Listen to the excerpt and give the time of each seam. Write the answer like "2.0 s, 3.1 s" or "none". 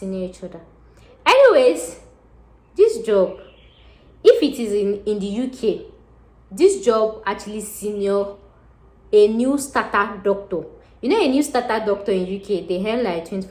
none